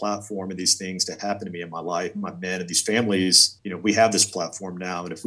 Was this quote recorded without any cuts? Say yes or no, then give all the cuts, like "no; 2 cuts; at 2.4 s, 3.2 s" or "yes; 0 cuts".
no; 1 cut; at 3.5 s